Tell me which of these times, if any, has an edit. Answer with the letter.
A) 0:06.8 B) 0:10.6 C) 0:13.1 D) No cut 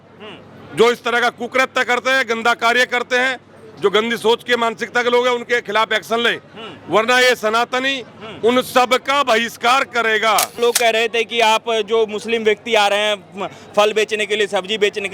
B